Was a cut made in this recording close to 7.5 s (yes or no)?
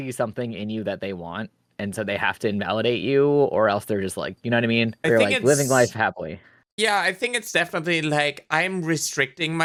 no